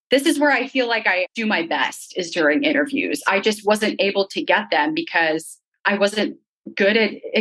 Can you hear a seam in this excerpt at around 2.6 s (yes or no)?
no